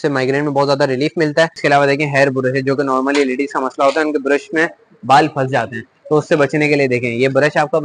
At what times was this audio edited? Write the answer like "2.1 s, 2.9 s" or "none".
1.6 s